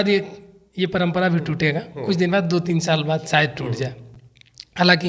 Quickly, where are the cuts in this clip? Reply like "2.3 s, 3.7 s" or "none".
none